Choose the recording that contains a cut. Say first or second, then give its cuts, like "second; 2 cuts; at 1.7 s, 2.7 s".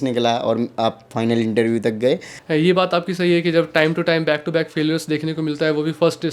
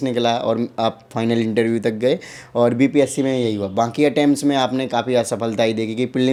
first; 1 cut; at 2.3 s